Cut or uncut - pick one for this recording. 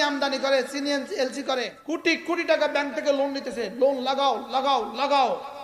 cut